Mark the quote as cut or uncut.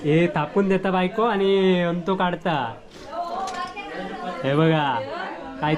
uncut